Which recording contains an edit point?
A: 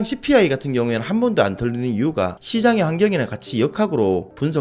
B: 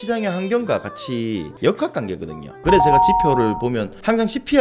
B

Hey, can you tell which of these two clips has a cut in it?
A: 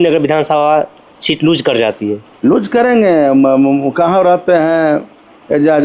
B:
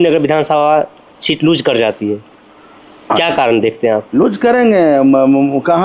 A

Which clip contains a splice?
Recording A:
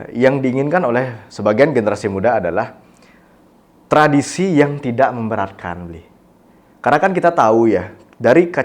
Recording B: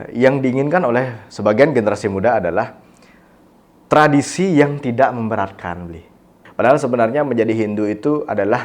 B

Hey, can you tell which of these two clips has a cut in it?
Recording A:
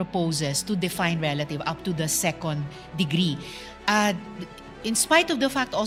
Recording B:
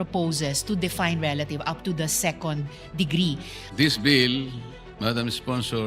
B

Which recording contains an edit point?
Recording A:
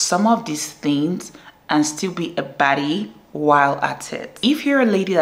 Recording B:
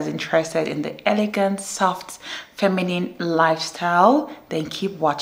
A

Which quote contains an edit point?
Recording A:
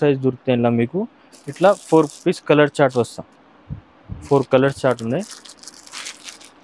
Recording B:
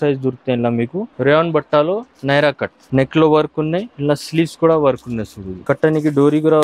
B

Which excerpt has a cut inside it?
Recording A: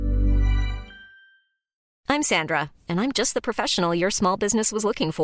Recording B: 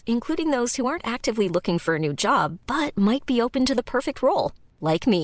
A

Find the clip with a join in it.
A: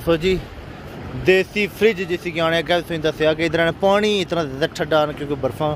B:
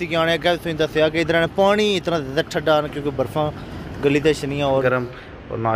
B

